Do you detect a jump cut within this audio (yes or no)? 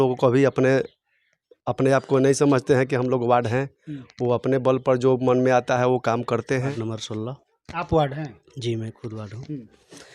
yes